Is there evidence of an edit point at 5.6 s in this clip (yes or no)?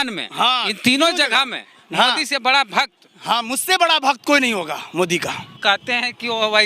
yes